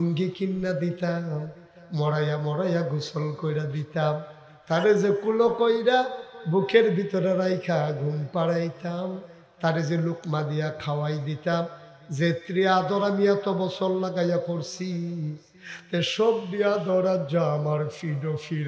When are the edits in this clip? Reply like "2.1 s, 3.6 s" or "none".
none